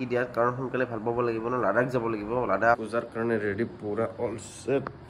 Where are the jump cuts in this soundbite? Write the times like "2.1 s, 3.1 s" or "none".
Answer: 2.8 s